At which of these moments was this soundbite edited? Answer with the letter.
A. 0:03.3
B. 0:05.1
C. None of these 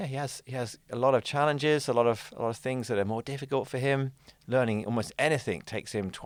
C